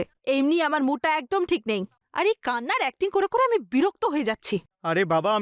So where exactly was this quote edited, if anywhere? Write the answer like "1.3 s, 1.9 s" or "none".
none

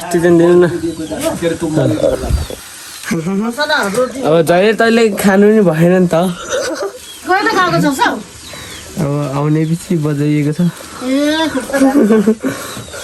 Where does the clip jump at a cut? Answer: none

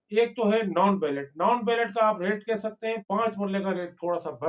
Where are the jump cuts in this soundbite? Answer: 3.0 s

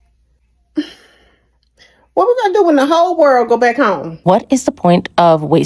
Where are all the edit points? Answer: 4.1 s

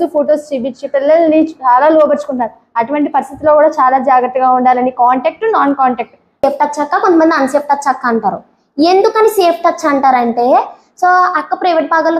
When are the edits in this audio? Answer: 6.4 s

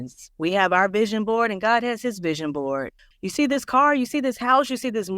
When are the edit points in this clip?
3.0 s

